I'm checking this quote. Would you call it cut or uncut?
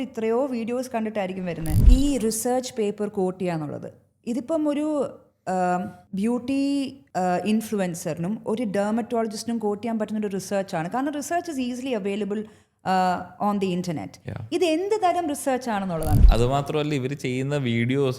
cut